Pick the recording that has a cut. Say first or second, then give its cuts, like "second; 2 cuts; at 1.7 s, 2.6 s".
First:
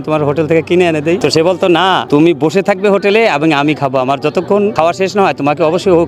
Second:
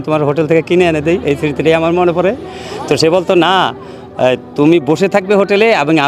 first; 3 cuts; at 1.2 s, 2.0 s, 4.7 s